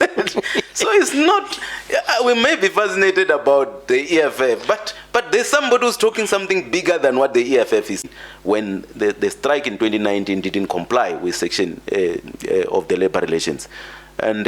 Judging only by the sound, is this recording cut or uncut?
cut